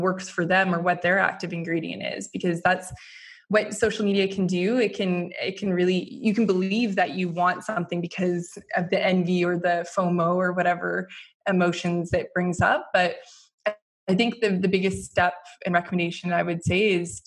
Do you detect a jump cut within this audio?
no; 0 cuts

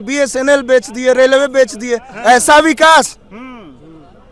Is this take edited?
no; 0 cuts

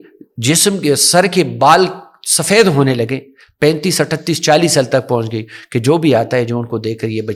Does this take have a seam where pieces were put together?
no; 0 cuts

